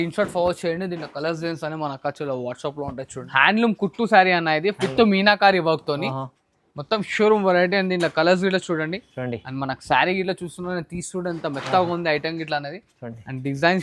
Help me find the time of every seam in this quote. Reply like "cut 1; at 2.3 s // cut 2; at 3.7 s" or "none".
cut 1; at 3.1 s